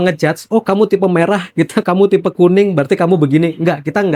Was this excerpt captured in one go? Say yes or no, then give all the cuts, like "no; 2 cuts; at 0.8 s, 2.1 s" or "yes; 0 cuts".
yes; 0 cuts